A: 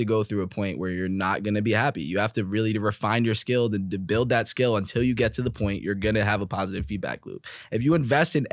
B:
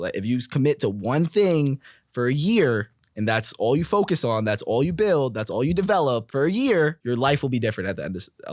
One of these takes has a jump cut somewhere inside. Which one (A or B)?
B